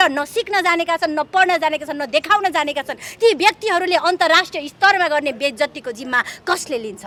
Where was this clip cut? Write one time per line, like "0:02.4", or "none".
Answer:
none